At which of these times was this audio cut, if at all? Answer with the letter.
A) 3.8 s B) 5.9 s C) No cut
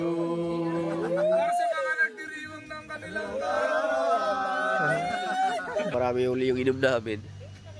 B